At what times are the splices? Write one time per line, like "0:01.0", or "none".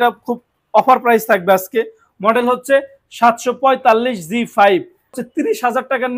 0:05.2